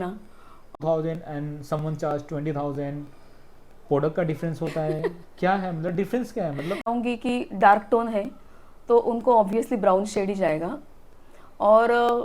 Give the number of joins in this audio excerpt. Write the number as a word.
two